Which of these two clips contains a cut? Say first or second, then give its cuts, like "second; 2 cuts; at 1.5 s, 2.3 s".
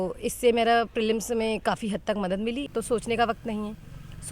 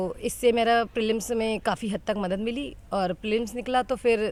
first; 1 cut; at 2.7 s